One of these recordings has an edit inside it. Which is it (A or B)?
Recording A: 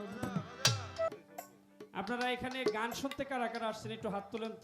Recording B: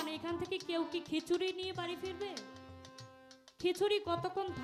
A